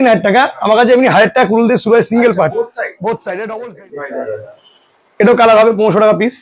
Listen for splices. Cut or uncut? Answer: cut